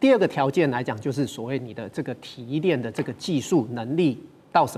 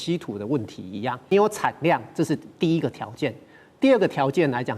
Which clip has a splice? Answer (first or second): second